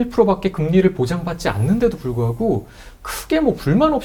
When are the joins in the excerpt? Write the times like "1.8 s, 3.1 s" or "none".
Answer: none